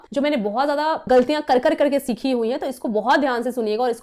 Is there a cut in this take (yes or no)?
no